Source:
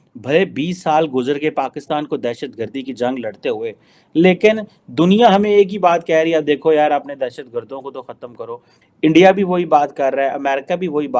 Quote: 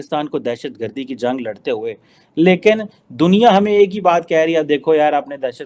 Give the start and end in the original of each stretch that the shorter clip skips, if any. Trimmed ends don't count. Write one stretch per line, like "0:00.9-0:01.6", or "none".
none